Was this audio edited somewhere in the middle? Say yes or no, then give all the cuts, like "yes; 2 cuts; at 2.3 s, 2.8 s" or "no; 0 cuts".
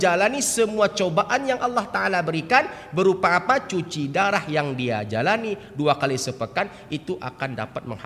no; 0 cuts